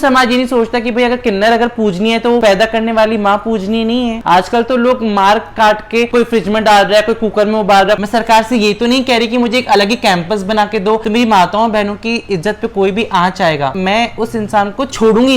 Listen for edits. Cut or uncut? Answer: cut